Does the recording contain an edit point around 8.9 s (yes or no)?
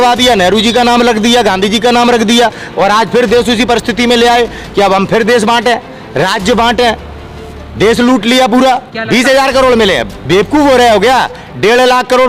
yes